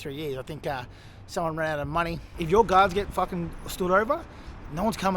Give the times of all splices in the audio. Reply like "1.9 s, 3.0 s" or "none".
2.2 s